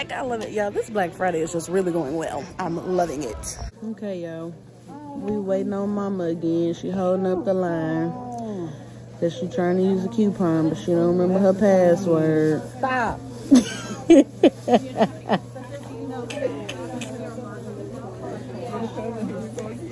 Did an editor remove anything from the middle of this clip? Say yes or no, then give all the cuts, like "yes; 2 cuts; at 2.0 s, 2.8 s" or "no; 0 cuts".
yes; 1 cut; at 3.6 s